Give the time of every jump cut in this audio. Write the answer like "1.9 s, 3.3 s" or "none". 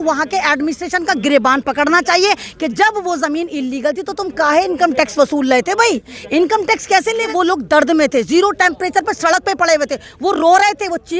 7.2 s

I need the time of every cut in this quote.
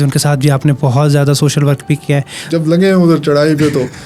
2.4 s

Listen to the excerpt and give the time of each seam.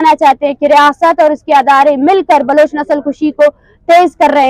none

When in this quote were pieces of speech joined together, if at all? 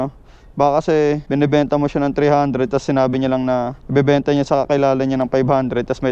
1.2 s, 3.8 s

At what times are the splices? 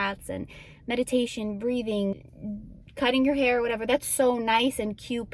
2.2 s

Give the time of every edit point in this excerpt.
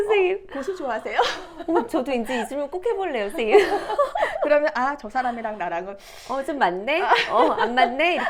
none

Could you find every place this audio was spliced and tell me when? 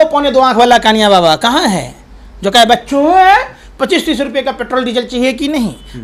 none

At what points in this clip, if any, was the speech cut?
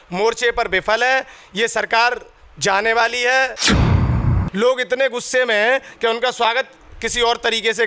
4.1 s

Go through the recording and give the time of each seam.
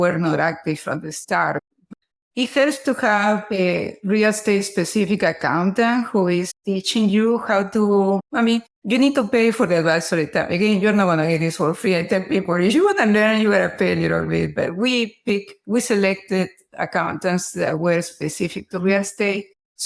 none

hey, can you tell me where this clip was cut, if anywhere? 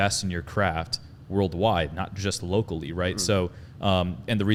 none

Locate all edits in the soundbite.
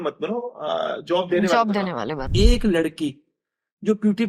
2.3 s

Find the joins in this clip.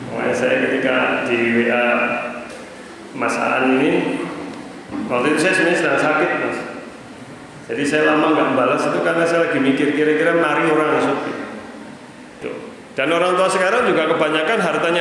12.4 s

